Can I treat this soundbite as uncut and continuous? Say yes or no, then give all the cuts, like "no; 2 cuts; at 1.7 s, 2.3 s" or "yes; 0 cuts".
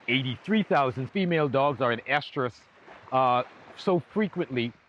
no; 1 cut; at 1.1 s